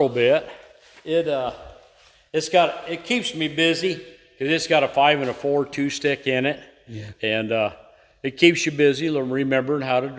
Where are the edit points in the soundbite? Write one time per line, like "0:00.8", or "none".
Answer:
none